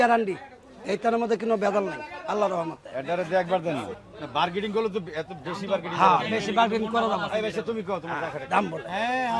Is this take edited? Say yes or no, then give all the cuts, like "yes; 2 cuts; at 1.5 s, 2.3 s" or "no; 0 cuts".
yes; 1 cut; at 3.9 s